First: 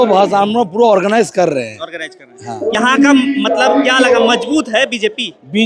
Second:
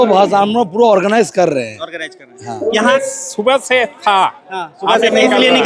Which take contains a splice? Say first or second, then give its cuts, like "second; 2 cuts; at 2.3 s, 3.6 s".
second; 1 cut; at 2.8 s